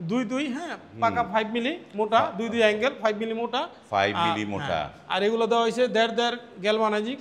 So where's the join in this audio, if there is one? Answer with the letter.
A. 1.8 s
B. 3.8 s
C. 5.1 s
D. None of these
D